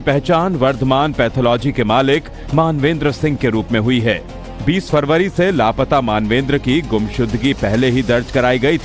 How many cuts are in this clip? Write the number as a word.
zero